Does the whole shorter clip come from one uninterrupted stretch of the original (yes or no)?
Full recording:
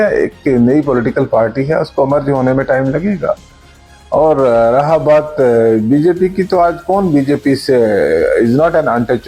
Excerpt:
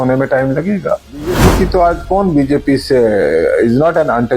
no